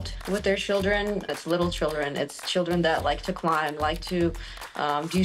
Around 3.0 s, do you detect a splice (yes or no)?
no